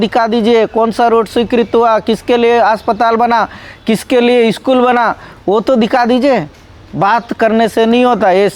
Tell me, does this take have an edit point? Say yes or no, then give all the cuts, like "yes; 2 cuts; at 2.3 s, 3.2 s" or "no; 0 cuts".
no; 0 cuts